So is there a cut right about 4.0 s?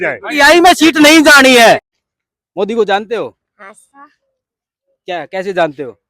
no; 1 cut; at 2.0 s

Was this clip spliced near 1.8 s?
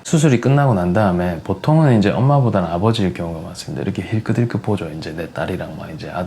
no; 0 cuts

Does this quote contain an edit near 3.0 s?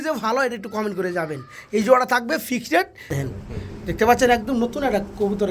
yes; 1 cut; at 3.0 s

